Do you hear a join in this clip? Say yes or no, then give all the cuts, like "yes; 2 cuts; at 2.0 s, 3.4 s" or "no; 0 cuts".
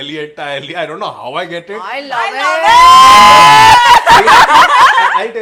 no; 0 cuts